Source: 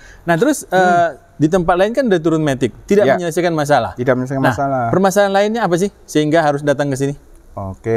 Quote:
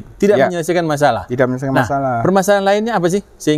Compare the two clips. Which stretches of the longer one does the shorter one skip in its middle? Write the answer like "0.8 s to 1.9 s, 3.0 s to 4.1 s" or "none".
none